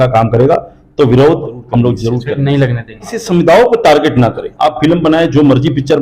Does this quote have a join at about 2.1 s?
yes; 2 cuts; at 2.1 s, 3.2 s

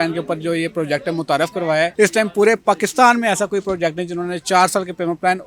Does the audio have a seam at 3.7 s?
no; 1 cut; at 1.9 s

